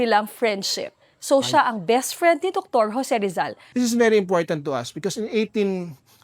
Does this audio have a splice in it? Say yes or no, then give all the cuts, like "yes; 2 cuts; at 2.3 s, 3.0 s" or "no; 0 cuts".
yes; 1 cut; at 3.6 s